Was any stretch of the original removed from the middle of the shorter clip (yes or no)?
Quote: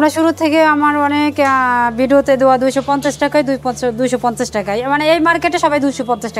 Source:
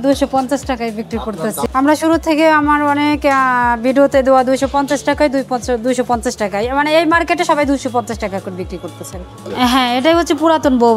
no